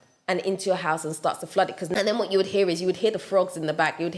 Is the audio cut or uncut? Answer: cut